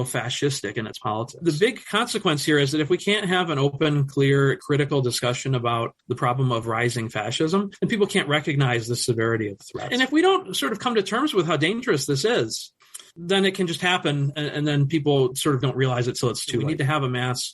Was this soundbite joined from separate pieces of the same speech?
yes; 3 cuts; at 1.3 s, 9.7 s, 16.7 s

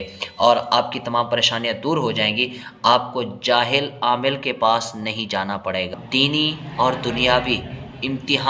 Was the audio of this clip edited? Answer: yes; 1 cut; at 5.9 s

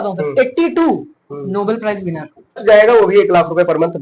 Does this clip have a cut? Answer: yes; 1 cut; at 2.6 s

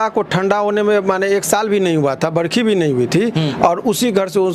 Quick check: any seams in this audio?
no; 0 cuts

